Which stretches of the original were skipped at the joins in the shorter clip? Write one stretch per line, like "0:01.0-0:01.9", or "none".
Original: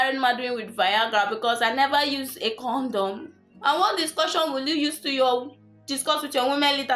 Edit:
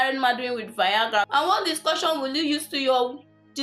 0:01.3-0:03.6